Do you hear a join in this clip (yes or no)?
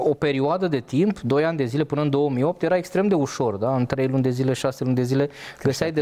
no